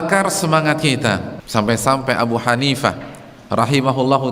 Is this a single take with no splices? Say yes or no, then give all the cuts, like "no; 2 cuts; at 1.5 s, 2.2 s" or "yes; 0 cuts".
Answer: no; 1 cut; at 1.4 s